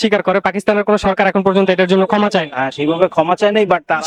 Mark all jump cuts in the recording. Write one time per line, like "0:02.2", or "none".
none